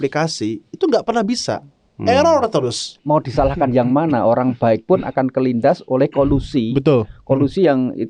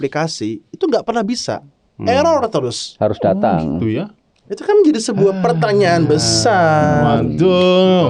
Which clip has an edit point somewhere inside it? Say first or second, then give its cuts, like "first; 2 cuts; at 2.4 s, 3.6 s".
first; 1 cut; at 2.9 s